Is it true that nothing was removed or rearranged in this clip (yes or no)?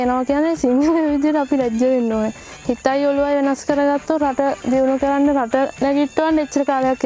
no